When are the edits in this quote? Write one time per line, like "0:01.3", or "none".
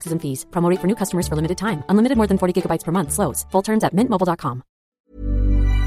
0:04.9